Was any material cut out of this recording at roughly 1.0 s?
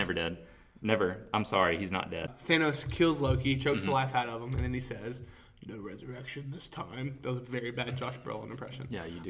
no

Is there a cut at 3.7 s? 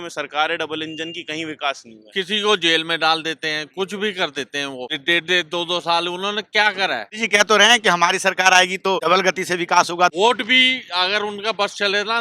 no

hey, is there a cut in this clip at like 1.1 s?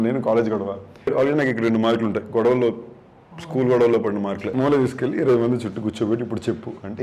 yes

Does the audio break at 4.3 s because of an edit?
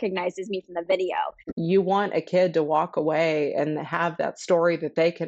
no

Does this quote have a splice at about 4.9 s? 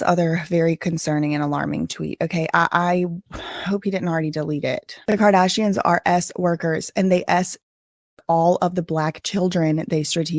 yes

